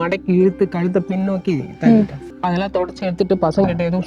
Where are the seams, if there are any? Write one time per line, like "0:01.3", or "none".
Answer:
0:02.2